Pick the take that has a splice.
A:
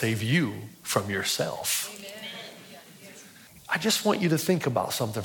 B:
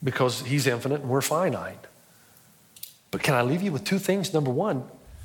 A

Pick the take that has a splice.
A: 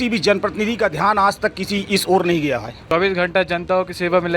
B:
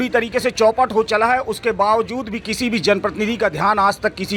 A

